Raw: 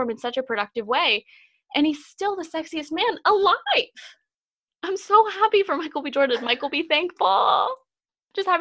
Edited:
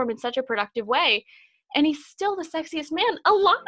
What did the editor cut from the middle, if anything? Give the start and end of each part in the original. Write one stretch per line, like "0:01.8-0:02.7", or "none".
none